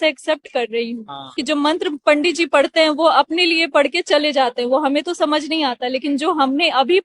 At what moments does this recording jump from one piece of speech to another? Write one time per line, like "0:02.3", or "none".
0:01.4